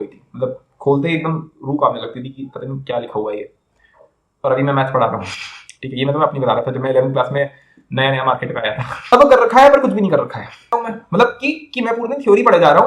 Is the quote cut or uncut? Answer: cut